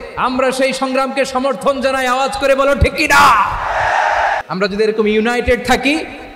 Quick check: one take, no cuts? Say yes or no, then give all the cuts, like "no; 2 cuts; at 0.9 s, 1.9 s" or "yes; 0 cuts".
no; 1 cut; at 4.4 s